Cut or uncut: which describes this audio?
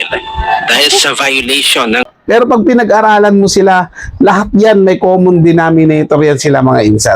cut